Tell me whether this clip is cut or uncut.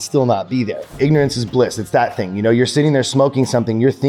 cut